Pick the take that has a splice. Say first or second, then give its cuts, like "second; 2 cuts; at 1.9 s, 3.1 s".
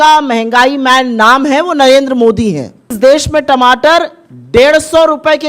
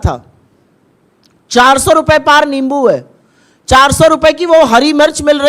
first; 1 cut; at 2.9 s